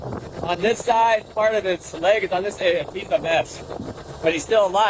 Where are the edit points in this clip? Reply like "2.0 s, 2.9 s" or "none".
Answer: none